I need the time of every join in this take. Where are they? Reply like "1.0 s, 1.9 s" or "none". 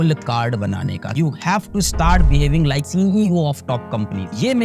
1.2 s